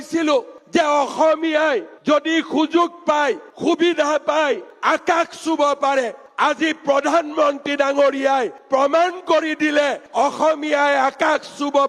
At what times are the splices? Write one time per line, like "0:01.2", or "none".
0:04.7